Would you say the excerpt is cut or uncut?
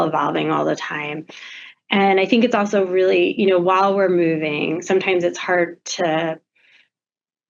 uncut